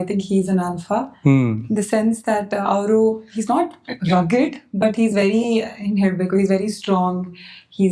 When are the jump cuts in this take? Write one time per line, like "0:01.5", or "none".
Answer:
none